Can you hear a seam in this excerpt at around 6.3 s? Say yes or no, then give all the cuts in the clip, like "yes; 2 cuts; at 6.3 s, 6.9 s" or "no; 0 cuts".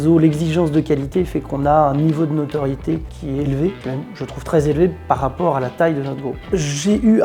yes; 3 cuts; at 3.1 s, 3.8 s, 6.3 s